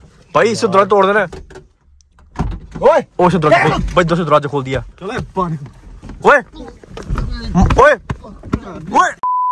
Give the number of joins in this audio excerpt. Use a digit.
0